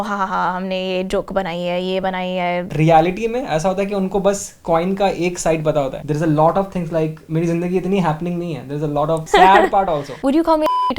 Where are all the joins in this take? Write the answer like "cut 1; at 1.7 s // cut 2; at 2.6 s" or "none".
cut 1; at 2.7 s // cut 2; at 9.2 s // cut 3; at 10.1 s